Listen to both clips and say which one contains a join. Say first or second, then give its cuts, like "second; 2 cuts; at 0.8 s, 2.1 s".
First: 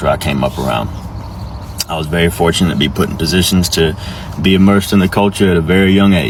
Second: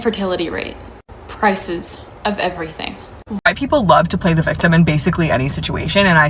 second; 1 cut; at 3.4 s